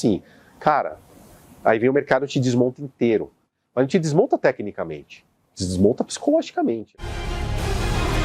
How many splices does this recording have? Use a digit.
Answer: 1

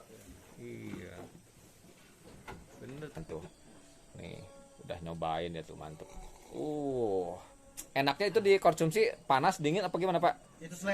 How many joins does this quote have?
1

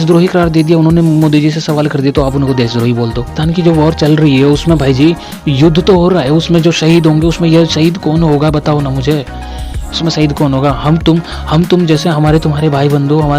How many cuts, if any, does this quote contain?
1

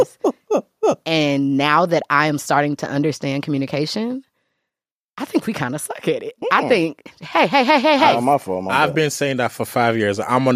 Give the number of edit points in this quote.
0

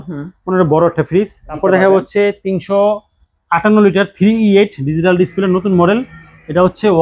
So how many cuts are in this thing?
1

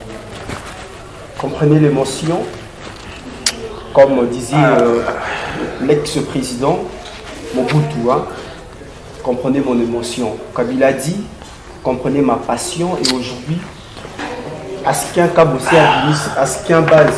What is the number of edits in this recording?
0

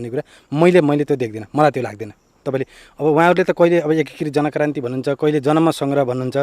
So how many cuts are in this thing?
1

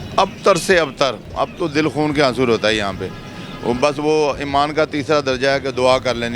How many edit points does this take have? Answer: 0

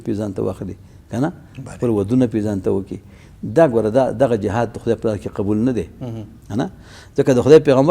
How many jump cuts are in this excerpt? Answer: 0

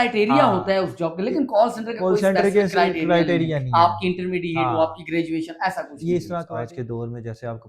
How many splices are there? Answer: 1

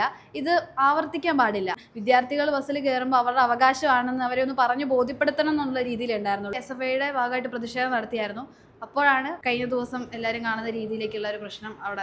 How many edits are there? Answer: 3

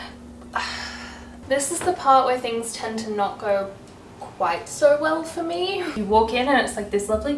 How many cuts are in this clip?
2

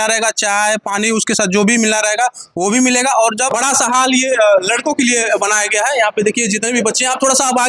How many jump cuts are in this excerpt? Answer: 1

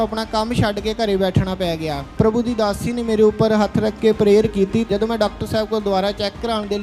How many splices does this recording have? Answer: 2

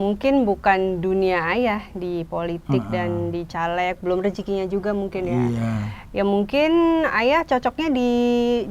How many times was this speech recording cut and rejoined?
0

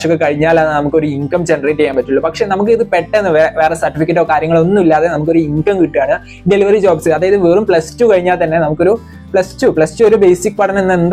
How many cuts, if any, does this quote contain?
0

